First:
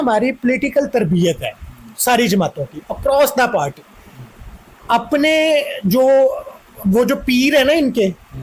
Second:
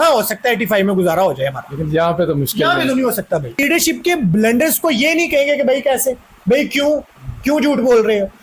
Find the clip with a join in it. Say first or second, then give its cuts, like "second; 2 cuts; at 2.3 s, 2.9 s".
second; 1 cut; at 3.5 s